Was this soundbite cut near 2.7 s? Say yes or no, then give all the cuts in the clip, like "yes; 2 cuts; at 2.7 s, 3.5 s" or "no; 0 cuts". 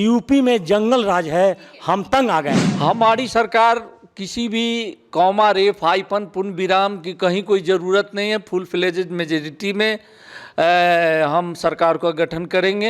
yes; 1 cut; at 2.7 s